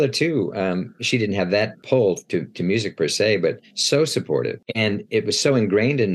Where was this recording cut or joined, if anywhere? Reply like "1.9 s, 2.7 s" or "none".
1.8 s, 4.6 s